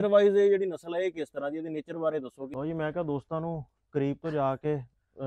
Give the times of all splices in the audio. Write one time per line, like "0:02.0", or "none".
0:02.5

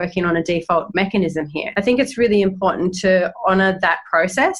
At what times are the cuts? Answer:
0:01.6

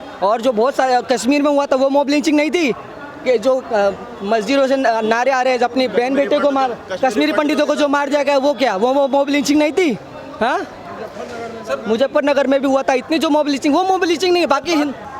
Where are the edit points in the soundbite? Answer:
none

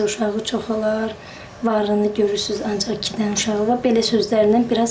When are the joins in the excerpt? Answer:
none

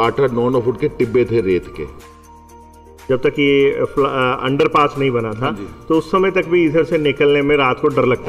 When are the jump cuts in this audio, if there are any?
0:02.6

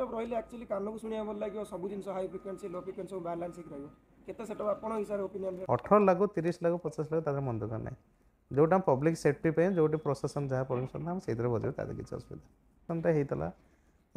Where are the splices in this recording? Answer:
0:05.6
0:12.8

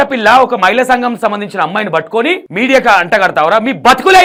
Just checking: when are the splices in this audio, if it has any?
none

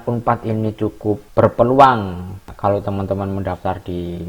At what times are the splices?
0:01.2
0:02.4

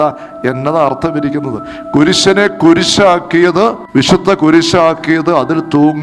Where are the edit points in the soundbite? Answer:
0:03.8

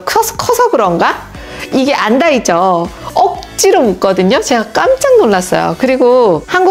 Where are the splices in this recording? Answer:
none

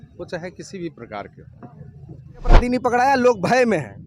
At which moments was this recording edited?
0:02.6

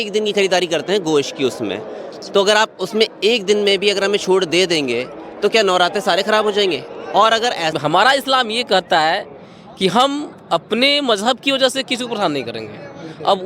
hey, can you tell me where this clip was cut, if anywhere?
0:07.7

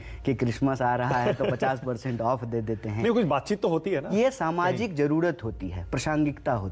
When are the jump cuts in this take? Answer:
none

